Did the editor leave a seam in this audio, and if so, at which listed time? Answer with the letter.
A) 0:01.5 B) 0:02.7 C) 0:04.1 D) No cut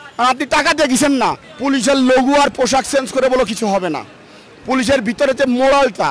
A